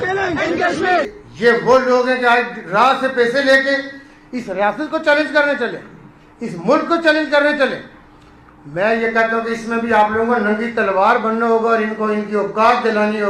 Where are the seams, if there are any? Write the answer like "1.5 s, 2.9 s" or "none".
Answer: 1.1 s

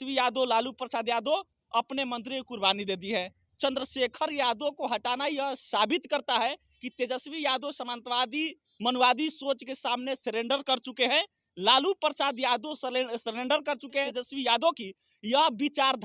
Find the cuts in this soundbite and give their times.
3.4 s, 14.1 s

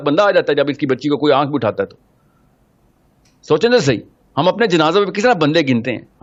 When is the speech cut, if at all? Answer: none

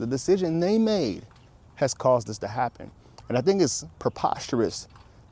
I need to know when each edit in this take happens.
none

